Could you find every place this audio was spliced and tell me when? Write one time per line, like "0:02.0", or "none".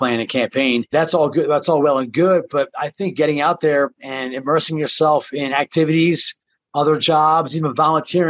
0:00.9